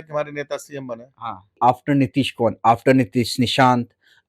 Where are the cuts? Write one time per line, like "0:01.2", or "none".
0:01.6